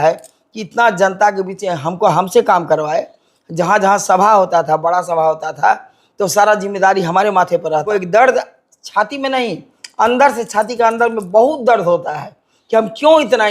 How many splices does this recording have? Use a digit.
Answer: 1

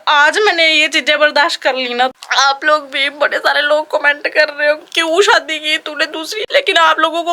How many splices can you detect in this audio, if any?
3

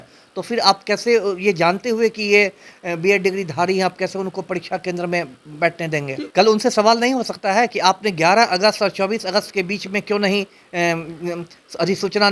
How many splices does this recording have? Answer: 1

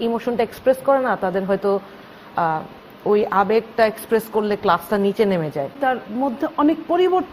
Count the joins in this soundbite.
1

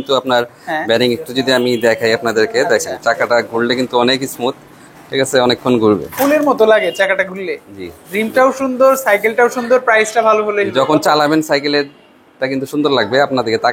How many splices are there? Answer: 0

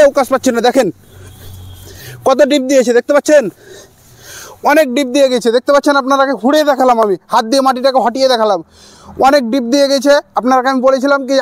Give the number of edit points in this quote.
0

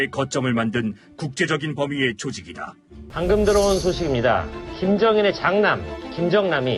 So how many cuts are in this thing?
1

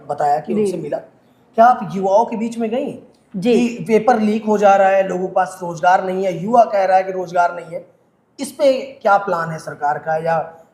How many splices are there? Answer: 0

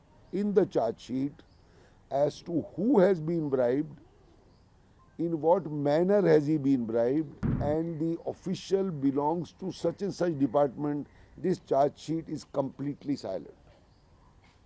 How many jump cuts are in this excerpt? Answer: 1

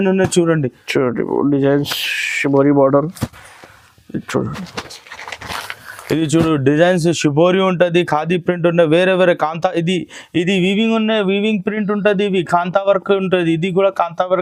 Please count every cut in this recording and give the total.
0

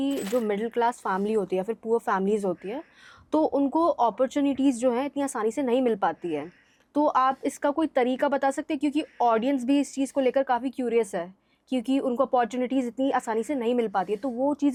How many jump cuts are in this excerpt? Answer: 0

